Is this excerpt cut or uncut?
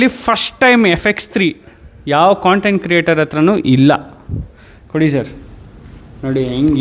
uncut